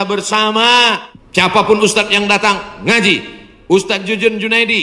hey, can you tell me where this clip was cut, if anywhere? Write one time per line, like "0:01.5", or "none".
0:01.1

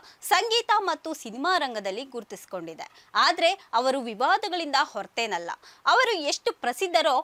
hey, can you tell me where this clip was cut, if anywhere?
none

